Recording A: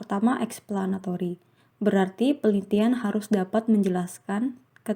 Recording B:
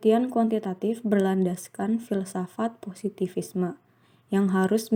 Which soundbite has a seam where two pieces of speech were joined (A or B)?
A